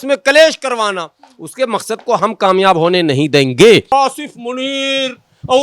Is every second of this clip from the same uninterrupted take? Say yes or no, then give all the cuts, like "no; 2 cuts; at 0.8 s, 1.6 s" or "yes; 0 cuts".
no; 1 cut; at 3.9 s